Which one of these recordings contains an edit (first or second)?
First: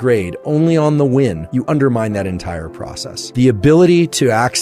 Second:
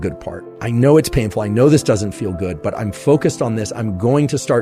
first